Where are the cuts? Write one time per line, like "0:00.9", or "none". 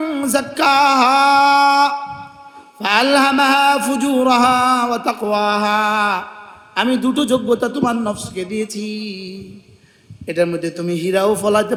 none